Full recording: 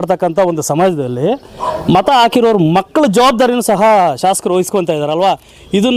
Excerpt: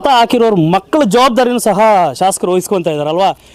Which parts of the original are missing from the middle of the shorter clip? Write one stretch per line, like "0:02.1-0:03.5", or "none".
none